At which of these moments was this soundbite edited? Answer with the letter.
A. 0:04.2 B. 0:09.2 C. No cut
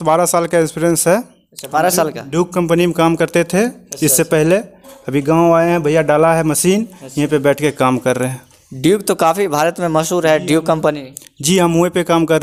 C